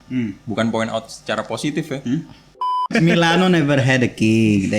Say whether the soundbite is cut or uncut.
cut